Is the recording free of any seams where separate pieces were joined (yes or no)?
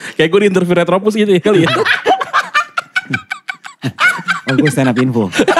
yes